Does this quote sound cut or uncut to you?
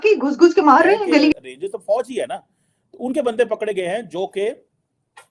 cut